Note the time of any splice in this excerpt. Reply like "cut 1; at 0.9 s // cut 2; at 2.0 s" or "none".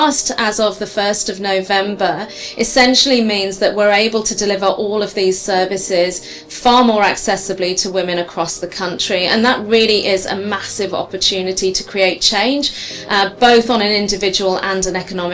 none